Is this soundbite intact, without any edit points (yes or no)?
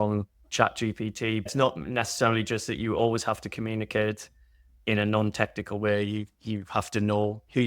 no